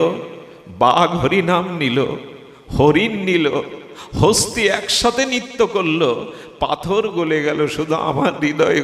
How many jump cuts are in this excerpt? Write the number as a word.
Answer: zero